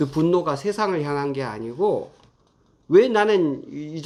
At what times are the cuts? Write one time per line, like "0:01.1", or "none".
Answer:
none